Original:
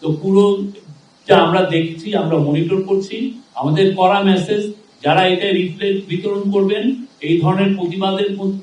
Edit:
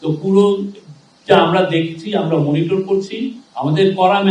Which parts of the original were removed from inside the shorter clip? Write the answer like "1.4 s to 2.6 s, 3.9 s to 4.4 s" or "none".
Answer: none